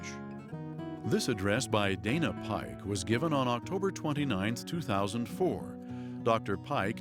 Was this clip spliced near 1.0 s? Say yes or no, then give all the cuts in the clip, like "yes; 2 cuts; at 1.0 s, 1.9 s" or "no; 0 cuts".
yes; 1 cut; at 1.0 s